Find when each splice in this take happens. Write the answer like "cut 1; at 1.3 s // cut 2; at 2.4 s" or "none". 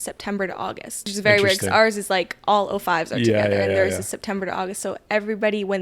cut 1; at 1.1 s